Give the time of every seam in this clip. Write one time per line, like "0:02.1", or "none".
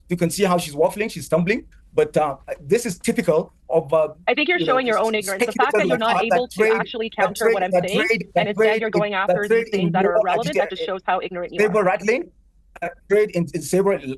none